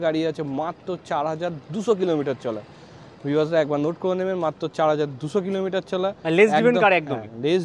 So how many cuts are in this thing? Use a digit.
0